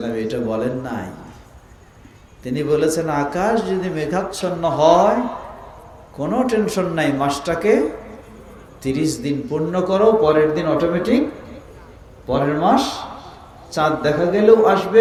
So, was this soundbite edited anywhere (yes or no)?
no